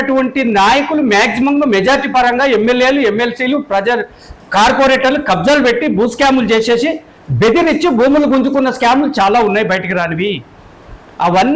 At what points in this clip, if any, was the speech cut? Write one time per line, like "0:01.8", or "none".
none